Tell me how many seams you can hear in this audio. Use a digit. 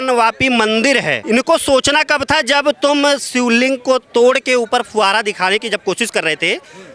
1